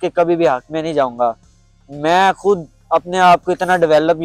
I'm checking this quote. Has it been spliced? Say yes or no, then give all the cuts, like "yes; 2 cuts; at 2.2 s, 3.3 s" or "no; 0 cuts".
no; 0 cuts